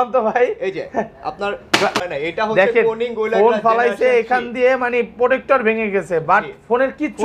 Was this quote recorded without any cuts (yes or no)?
no